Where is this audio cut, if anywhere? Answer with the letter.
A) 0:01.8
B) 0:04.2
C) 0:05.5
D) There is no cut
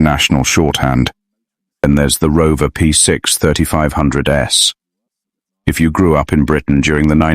A